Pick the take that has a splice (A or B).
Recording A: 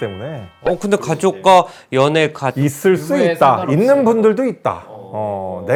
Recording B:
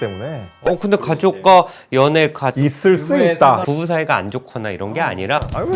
B